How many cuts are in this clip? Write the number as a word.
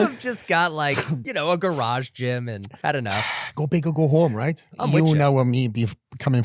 three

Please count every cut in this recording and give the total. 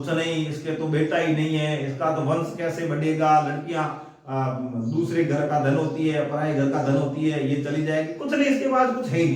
zero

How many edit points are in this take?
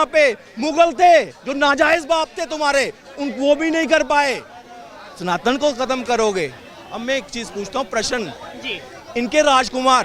zero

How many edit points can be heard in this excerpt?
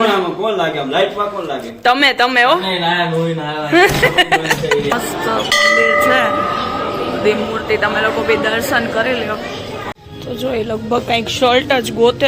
two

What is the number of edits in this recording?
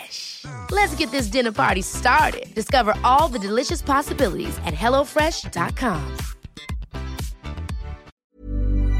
one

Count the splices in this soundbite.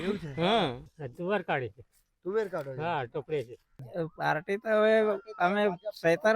two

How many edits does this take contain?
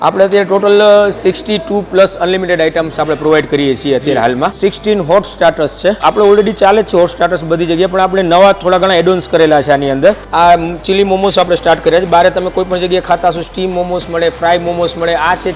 three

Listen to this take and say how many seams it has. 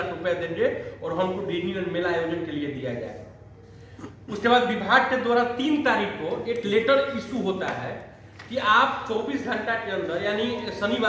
zero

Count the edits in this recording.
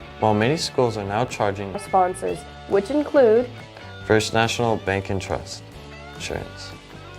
two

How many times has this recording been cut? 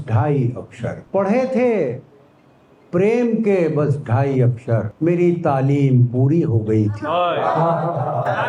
two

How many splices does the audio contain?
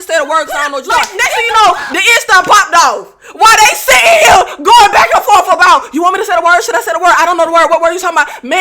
one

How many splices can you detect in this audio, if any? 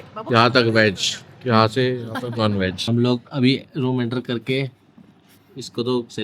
one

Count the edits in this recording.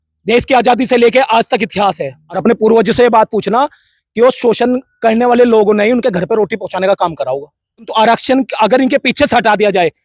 two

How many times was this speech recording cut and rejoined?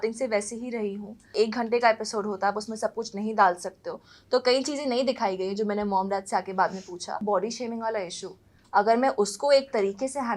two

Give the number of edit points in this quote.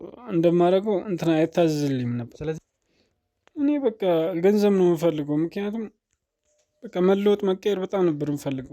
one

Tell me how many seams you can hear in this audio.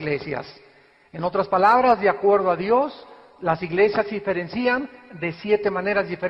one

